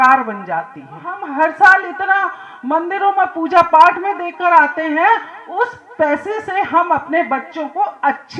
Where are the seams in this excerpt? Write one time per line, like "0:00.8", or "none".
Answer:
0:01.2